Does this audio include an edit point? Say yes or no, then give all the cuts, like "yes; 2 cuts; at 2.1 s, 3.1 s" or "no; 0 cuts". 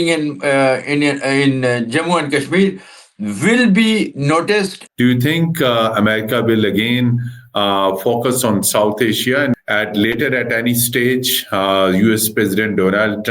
yes; 2 cuts; at 4.8 s, 9.5 s